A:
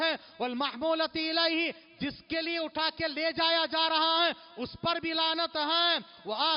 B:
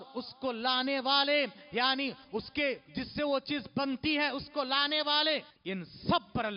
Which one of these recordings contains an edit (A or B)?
B